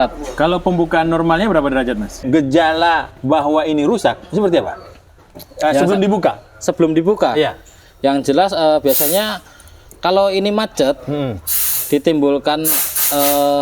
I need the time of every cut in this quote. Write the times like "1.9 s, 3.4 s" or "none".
2.2 s